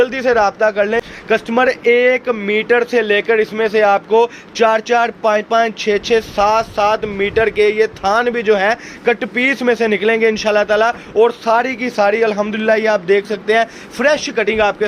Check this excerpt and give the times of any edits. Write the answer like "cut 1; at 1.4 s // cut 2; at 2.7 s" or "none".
cut 1; at 1.1 s